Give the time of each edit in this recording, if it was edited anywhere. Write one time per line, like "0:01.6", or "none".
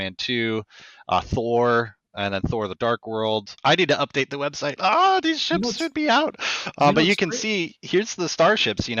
0:03.5